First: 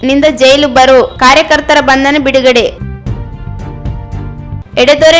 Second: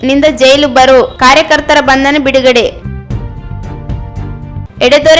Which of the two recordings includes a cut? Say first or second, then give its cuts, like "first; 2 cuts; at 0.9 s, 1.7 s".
second; 2 cuts; at 2.8 s, 4.2 s